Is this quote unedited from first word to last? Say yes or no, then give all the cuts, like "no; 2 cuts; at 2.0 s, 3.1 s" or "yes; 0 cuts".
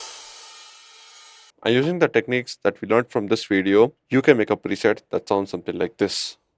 no; 2 cuts; at 1.5 s, 4.0 s